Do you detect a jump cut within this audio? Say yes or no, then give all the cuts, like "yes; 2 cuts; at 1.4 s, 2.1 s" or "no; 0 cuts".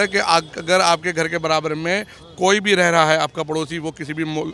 no; 0 cuts